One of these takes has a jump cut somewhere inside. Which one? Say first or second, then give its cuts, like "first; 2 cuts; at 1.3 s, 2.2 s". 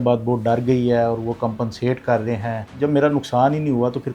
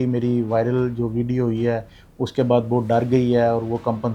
first; 1 cut; at 2.7 s